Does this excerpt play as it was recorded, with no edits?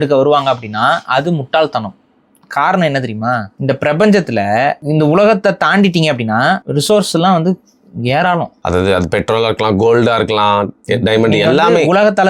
no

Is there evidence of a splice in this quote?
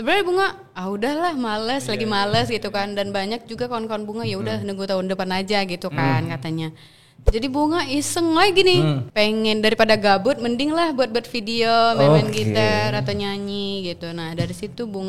yes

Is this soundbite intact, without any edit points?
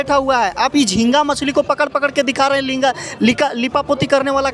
yes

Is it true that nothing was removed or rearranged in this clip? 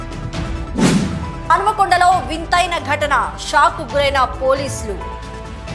no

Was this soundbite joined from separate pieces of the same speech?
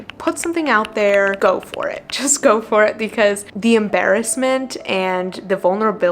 yes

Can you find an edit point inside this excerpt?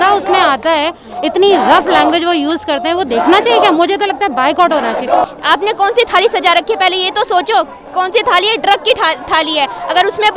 yes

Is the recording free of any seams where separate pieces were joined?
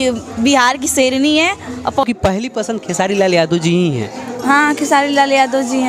no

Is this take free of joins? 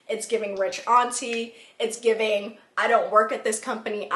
yes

